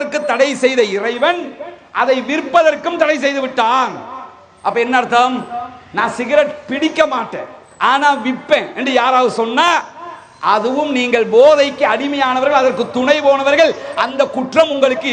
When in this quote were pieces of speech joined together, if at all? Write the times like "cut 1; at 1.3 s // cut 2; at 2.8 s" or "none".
none